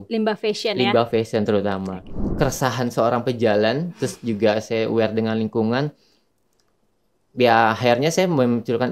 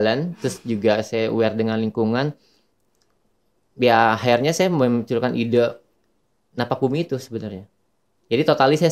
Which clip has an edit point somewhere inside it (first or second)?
first